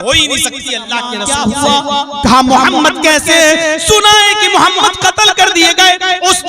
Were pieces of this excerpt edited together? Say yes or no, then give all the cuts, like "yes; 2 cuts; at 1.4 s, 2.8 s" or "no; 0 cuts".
yes; 1 cut; at 1.2 s